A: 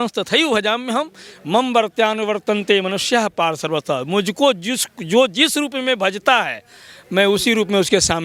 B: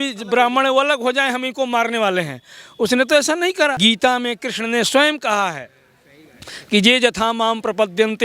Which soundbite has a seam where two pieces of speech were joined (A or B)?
B